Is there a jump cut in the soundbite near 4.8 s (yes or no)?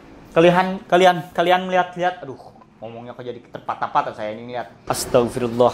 yes